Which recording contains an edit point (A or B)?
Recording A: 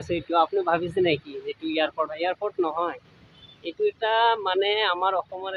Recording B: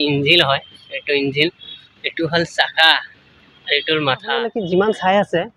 B